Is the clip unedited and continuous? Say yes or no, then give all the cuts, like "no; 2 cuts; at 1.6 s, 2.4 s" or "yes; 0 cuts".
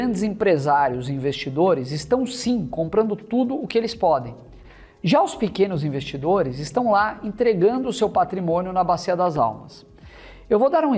yes; 0 cuts